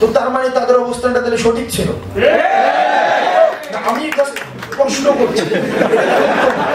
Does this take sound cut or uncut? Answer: uncut